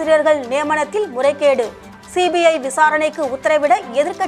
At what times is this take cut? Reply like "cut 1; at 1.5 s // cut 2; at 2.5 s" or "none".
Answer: none